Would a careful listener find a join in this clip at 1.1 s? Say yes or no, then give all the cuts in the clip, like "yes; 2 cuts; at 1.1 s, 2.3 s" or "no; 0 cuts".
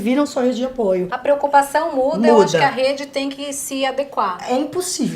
yes; 1 cut; at 1.1 s